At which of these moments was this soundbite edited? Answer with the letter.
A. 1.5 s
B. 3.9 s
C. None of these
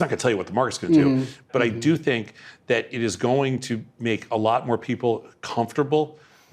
A